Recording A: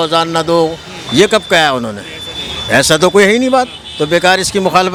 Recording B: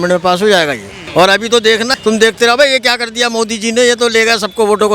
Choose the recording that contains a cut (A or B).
B